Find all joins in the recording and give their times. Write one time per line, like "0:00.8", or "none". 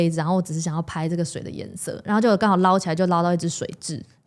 none